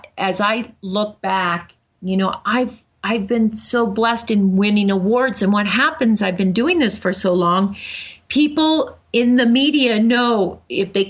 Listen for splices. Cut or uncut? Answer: cut